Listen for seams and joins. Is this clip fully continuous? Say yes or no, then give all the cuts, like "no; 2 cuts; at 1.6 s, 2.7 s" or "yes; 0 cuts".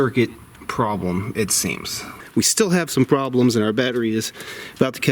no; 1 cut; at 2.1 s